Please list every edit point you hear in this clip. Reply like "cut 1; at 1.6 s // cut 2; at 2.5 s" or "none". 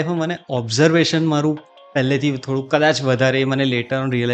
none